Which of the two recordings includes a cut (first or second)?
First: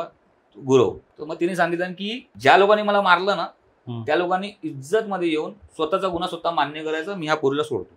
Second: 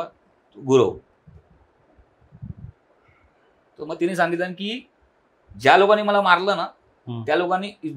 first